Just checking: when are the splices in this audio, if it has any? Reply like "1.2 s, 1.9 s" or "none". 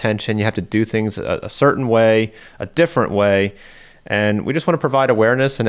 4.1 s

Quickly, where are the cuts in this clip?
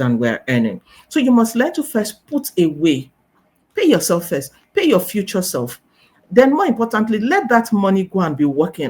none

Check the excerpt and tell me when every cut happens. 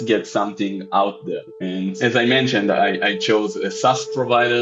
none

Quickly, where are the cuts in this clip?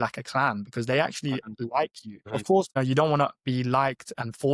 2.2 s

